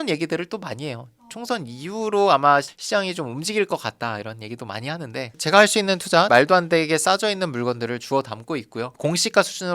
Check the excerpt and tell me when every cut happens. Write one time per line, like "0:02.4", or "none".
0:05.3
0:09.0